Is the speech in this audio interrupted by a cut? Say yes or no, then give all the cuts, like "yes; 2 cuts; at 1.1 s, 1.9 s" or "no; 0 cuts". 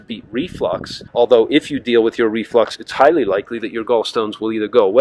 yes; 1 cut; at 1.0 s